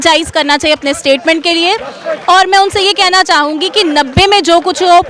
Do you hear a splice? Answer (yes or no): no